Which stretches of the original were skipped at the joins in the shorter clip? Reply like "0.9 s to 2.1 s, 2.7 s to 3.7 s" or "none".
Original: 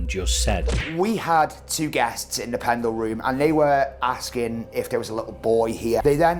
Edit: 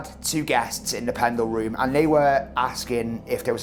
none